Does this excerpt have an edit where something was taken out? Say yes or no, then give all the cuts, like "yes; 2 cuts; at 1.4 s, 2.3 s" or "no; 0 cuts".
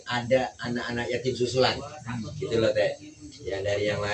no; 0 cuts